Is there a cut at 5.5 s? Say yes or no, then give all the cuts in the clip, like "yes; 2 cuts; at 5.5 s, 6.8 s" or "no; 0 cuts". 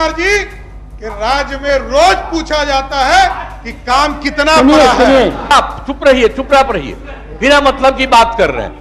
yes; 1 cut; at 5.5 s